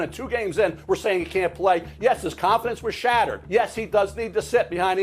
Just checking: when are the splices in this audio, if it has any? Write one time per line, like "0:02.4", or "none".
0:03.4